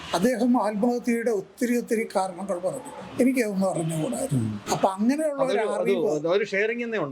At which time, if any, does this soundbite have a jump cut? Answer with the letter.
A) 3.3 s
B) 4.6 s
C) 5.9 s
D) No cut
B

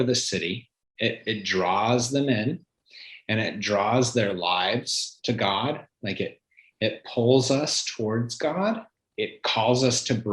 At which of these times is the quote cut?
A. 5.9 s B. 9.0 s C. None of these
B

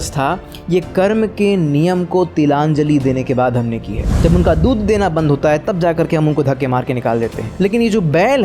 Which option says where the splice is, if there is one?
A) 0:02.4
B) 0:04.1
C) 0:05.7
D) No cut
B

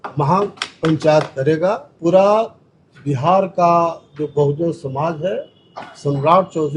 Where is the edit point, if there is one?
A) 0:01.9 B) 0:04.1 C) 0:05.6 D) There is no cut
A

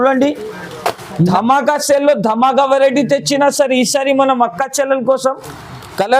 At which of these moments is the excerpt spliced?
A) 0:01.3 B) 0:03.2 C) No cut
A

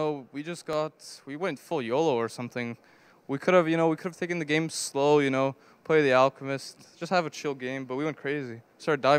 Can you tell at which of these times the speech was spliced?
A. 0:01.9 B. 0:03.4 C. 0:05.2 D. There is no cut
C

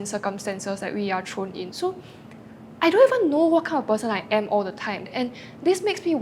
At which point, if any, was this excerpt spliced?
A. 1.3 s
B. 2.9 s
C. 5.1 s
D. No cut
C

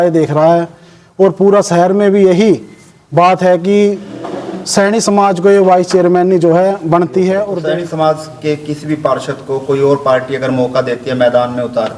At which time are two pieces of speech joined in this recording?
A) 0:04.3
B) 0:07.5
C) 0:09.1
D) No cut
B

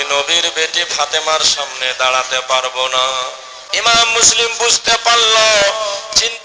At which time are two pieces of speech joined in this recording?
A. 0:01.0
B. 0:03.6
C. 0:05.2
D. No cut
B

